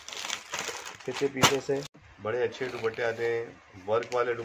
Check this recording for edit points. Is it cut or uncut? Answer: cut